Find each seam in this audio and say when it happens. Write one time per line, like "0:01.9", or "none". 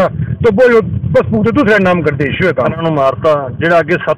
0:02.8